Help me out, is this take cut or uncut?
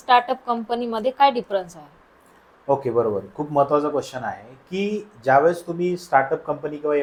uncut